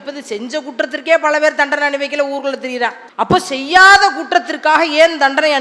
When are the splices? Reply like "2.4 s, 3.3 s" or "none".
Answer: 3.0 s